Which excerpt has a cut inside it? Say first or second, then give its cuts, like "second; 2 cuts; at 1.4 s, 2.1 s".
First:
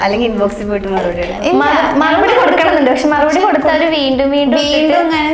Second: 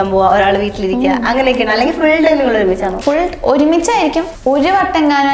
second; 2 cuts; at 2.9 s, 4.3 s